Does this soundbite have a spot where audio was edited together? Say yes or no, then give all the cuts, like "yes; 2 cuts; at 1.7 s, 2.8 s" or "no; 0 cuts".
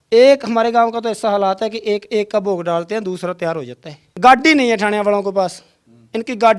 yes; 1 cut; at 4.0 s